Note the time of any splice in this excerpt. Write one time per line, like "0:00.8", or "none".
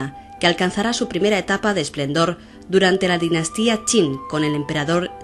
0:02.5